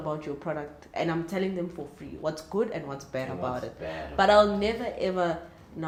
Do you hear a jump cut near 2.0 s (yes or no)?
no